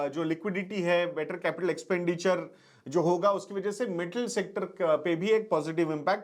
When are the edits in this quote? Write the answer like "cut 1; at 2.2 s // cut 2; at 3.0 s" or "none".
none